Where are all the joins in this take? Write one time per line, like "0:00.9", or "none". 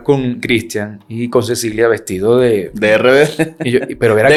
none